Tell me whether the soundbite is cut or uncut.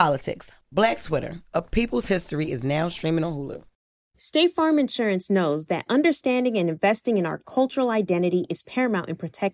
cut